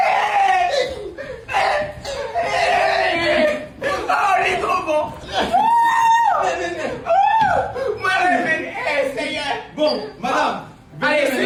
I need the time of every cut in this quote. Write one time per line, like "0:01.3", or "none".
none